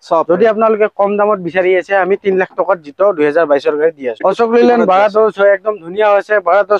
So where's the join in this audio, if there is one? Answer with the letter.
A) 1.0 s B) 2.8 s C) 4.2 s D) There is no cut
C